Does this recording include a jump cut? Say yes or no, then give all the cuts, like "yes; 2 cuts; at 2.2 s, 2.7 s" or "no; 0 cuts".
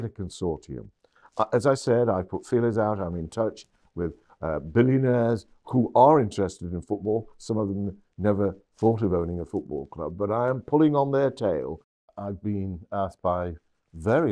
yes; 1 cut; at 11.9 s